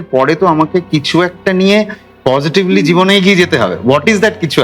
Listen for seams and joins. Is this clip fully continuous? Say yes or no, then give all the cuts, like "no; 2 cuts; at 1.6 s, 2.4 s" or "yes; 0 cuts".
yes; 0 cuts